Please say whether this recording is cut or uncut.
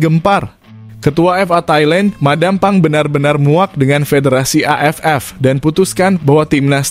uncut